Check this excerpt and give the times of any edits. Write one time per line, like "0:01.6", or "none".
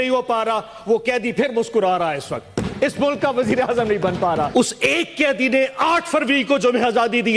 0:04.5